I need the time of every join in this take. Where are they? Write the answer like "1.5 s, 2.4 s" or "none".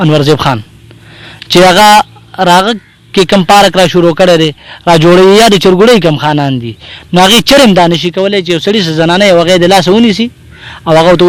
none